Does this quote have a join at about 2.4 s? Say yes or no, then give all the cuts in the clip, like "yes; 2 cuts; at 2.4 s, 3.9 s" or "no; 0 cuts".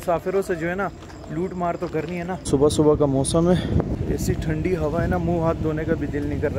yes; 2 cuts; at 2.4 s, 3.9 s